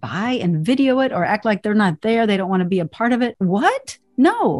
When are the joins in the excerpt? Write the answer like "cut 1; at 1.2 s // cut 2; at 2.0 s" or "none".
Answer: cut 1; at 3.3 s

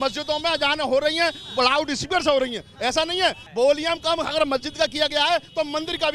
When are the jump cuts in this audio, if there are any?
cut 1; at 3.4 s

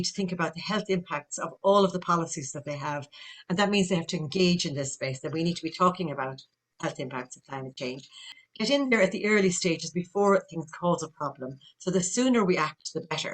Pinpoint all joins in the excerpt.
cut 1; at 8.3 s

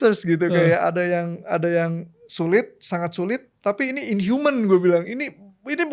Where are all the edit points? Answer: none

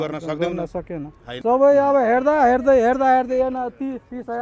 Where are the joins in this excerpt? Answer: cut 1; at 1.3 s

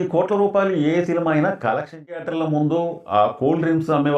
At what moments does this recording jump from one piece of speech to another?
cut 1; at 2.2 s

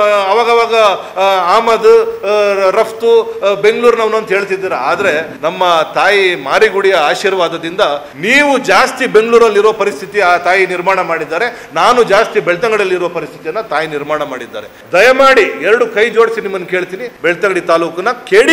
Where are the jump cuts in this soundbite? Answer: cut 1; at 5.3 s // cut 2; at 8.1 s // cut 3; at 14.8 s // cut 4; at 17.0 s

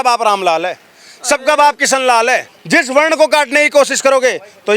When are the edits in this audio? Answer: cut 1; at 2.5 s

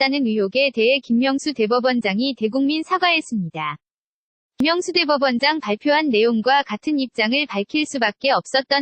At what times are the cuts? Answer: cut 1; at 4.6 s

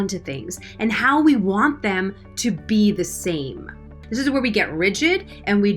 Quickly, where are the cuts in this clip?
cut 1; at 4.0 s

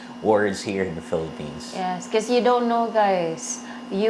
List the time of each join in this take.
none

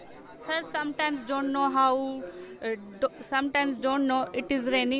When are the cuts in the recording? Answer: none

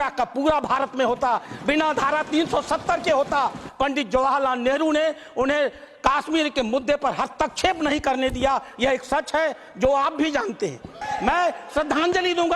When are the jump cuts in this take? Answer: cut 1; at 3.6 s // cut 2; at 11.0 s

